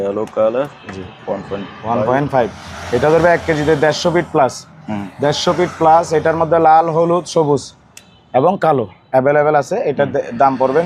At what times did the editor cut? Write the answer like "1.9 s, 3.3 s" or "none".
none